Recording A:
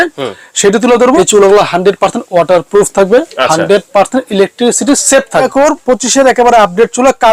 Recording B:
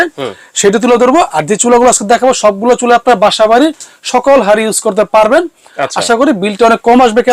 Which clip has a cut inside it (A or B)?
A